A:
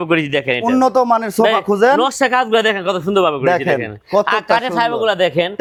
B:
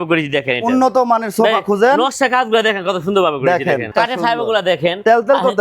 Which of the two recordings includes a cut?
B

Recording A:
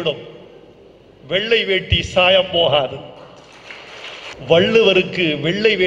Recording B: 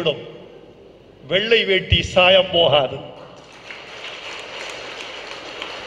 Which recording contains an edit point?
A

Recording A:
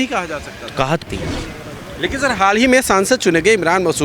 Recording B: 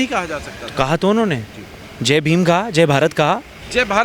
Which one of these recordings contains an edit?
A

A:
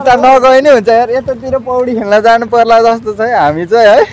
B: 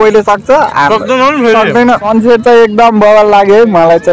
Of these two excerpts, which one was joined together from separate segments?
B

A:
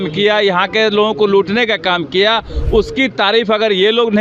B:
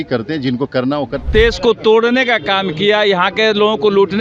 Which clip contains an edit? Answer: B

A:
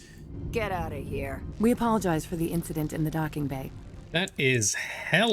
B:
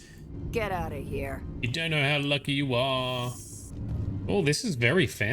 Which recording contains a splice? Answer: A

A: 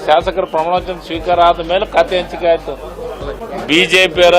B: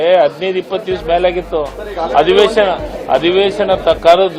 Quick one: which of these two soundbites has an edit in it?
A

